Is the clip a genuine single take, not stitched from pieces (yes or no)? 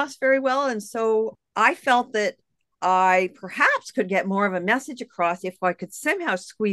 yes